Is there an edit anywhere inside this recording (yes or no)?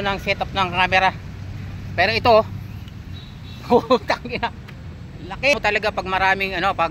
yes